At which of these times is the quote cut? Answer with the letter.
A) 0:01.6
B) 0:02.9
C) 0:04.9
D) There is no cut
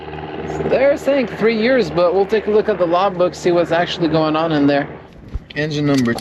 C